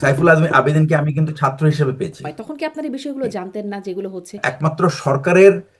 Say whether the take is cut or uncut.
cut